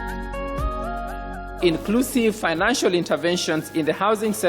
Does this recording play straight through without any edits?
no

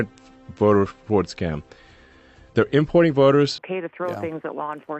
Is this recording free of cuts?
no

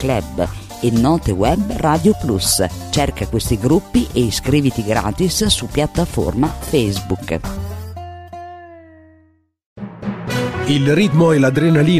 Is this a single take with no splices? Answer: no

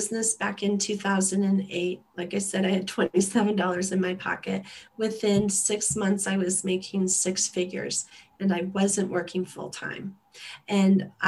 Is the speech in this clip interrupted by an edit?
no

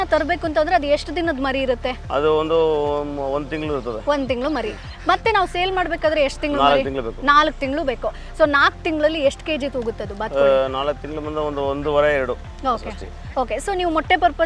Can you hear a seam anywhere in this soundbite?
no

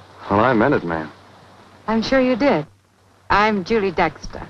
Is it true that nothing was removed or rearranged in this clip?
no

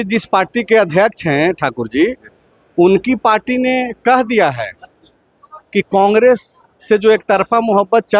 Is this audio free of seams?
yes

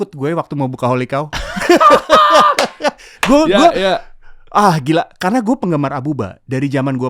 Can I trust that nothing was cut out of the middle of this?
yes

